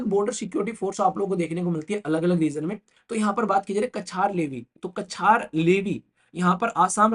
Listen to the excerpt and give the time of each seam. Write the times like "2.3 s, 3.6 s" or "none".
2.9 s